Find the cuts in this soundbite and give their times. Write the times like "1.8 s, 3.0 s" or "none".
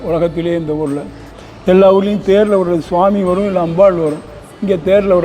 1.2 s